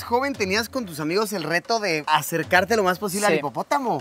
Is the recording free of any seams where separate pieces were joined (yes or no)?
yes